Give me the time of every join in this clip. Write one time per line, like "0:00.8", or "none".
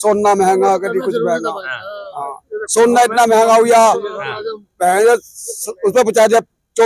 none